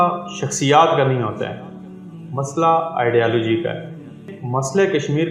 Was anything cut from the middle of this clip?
yes; 1 cut; at 4.4 s

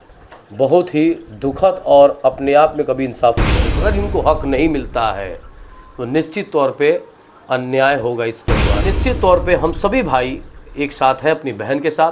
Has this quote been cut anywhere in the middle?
yes; 2 cuts; at 3.6 s, 8.9 s

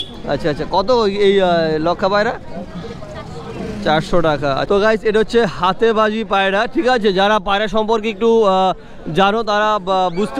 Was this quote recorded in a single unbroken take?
no; 1 cut; at 4.7 s

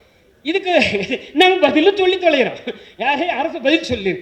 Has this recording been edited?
no; 0 cuts

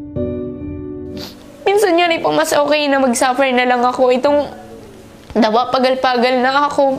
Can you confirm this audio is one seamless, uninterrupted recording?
no; 1 cut; at 1.2 s

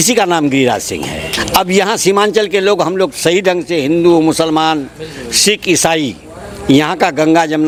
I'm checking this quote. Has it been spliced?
no; 0 cuts

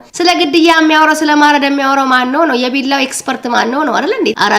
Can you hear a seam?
no; 0 cuts

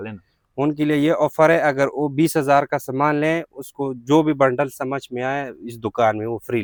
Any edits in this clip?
no; 0 cuts

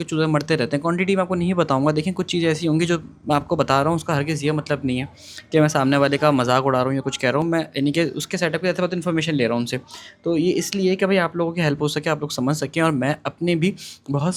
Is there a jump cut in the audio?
no; 0 cuts

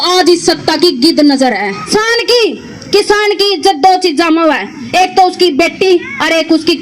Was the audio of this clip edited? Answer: yes; 1 cut; at 1.9 s

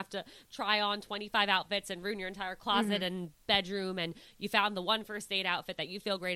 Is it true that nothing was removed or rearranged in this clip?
yes; 0 cuts

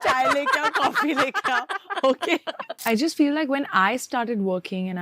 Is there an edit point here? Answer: yes; 1 cut; at 2.7 s

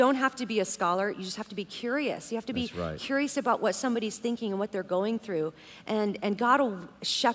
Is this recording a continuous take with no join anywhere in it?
yes; 0 cuts

